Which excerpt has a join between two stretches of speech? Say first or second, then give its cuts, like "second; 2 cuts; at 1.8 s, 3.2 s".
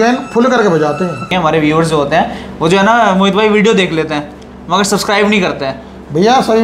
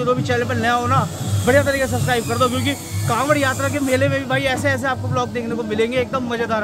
first; 1 cut; at 1.3 s